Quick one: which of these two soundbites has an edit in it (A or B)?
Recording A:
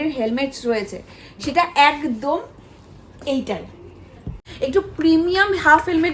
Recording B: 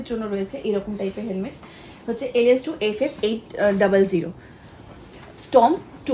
A